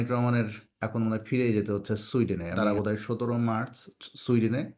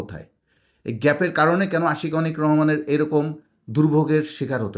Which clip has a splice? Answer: first; 1 cut; at 2.6 s

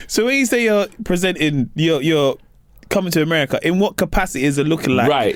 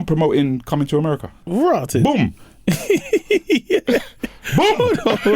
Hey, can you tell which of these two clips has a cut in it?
second; 1 cut; at 1.3 s

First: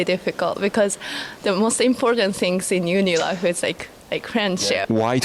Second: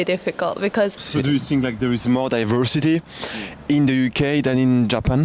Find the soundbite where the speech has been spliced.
second; 1 cut; at 1.0 s

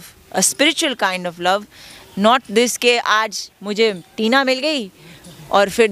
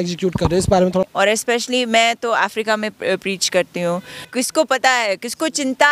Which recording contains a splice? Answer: second; 2 cuts; at 1.1 s, 4.2 s

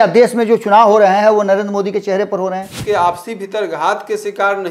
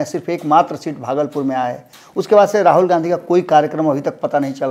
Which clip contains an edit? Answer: first; 1 cut; at 2.7 s

